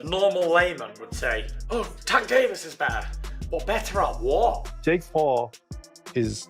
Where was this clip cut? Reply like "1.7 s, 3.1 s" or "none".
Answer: 4.7 s